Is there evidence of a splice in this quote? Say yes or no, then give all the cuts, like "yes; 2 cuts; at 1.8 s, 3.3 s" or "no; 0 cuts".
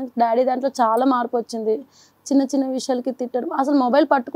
no; 0 cuts